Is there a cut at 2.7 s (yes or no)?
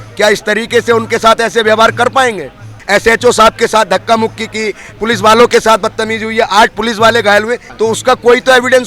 yes